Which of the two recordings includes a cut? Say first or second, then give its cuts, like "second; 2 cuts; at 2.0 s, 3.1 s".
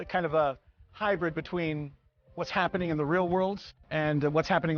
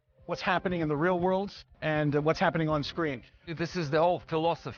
second; 1 cut; at 3.6 s